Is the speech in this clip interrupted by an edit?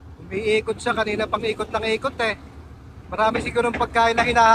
no; 0 cuts

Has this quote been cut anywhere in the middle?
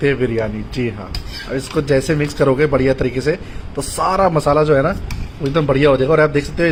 no; 0 cuts

